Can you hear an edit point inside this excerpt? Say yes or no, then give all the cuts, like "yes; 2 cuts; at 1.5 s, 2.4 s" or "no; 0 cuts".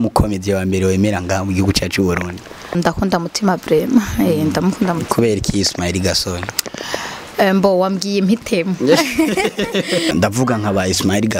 yes; 2 cuts; at 2.8 s, 10.1 s